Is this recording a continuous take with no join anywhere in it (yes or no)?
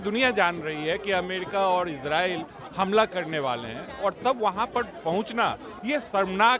no